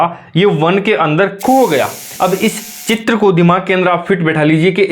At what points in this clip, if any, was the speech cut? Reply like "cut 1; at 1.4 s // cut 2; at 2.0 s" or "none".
cut 1; at 2.0 s